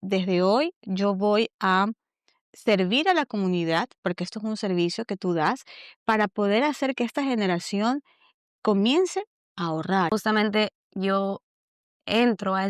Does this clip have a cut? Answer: no; 0 cuts

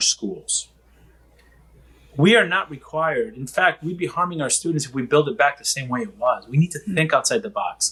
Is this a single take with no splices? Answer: yes; 0 cuts

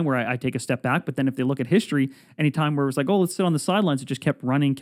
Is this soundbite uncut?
yes; 0 cuts

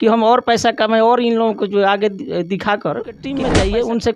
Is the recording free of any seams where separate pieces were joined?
no; 1 cut; at 3.3 s

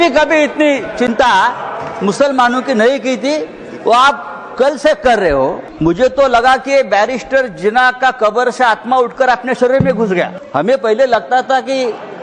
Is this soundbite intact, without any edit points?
no; 2 cuts; at 5.7 s, 10.4 s

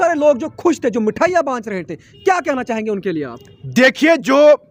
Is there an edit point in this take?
no; 0 cuts

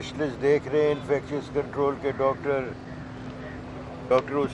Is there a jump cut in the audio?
no; 0 cuts

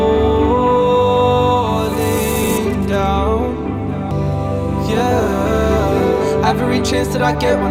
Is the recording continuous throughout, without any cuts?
yes; 0 cuts

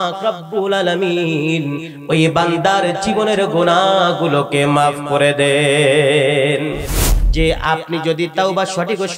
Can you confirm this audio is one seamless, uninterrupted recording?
no; 1 cut; at 7.1 s

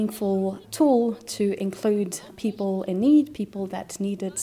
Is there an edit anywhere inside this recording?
yes; 1 cut; at 2.2 s

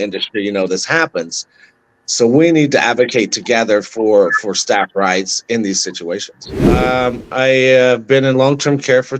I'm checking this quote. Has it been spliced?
yes; 1 cut; at 6.8 s

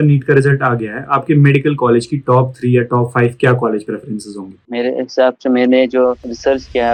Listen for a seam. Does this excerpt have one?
no; 0 cuts

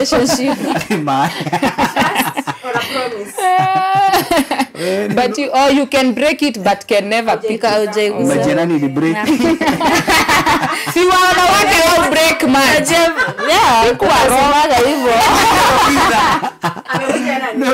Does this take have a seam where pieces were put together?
no; 0 cuts

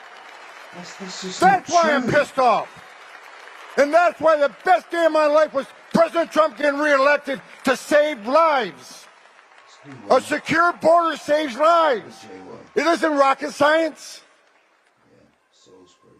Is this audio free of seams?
yes; 0 cuts

